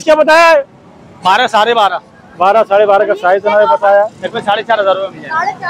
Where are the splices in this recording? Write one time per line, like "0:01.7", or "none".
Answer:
none